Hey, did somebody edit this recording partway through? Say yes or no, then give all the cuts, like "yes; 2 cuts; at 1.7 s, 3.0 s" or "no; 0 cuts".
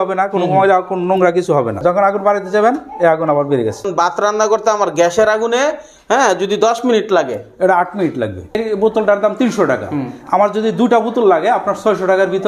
yes; 3 cuts; at 1.8 s, 3.9 s, 8.6 s